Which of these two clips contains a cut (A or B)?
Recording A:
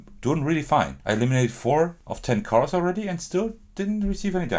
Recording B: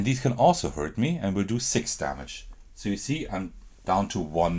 A